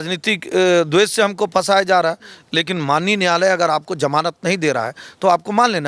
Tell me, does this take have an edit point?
no; 0 cuts

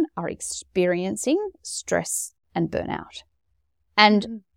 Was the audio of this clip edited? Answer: no; 0 cuts

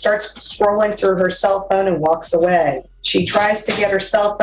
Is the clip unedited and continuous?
no; 1 cut; at 2.9 s

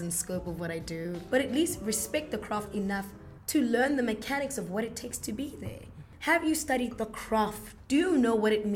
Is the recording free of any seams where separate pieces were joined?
no; 3 cuts; at 1.2 s, 6.1 s, 7.7 s

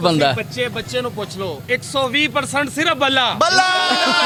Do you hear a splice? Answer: no; 0 cuts

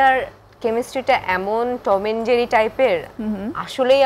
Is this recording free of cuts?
yes; 0 cuts

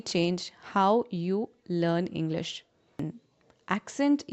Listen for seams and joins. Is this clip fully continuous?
no; 1 cut; at 3.0 s

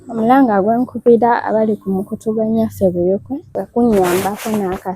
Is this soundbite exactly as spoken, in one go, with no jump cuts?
no; 1 cut; at 3.4 s

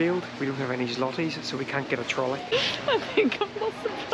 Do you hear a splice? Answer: yes; 1 cut; at 2.5 s

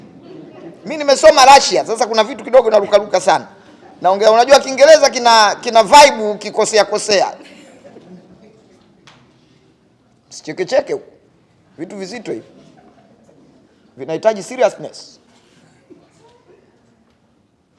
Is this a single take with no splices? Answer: yes; 0 cuts

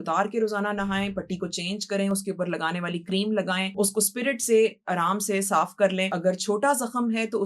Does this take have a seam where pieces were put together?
yes; 2 cuts; at 3.7 s, 6.1 s

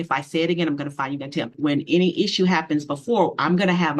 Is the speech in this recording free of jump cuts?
no; 1 cut; at 1.5 s

